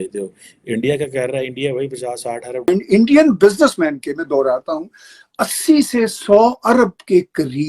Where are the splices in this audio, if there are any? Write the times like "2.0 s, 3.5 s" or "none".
2.7 s